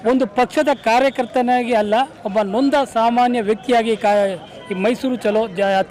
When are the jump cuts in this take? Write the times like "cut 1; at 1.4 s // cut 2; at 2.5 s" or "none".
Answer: none

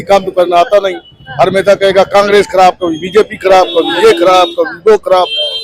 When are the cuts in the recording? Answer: none

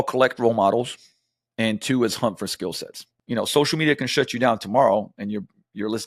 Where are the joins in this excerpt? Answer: cut 1; at 3.1 s

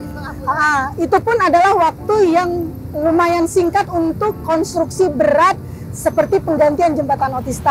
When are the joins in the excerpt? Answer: none

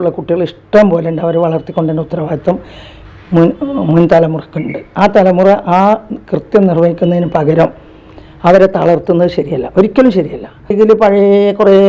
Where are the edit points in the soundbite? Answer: cut 1; at 10.7 s

